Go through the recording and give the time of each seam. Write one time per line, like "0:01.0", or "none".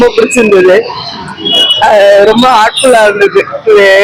none